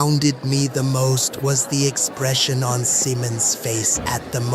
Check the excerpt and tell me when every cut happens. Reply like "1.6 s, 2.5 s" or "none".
none